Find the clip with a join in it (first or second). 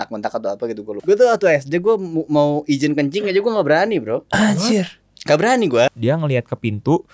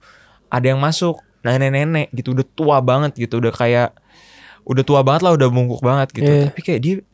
first